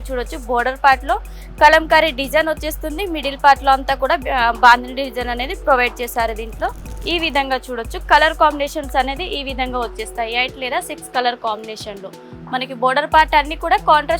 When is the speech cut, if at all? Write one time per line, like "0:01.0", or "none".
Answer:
0:06.9

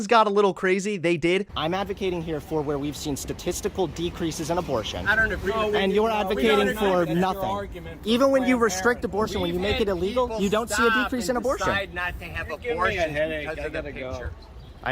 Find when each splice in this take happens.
0:01.5

